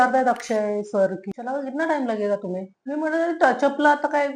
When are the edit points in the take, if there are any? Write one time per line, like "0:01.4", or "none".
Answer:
0:01.3
0:02.7